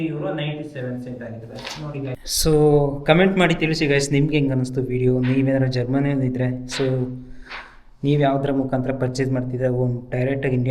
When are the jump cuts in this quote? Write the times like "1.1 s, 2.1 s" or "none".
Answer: 2.2 s